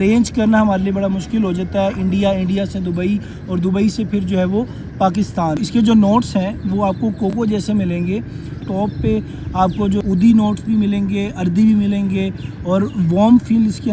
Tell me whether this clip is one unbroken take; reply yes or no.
no